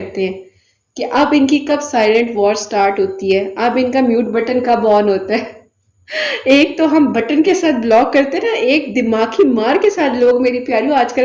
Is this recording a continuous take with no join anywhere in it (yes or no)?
yes